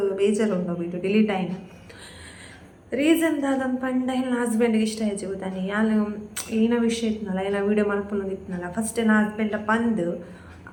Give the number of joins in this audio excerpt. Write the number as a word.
zero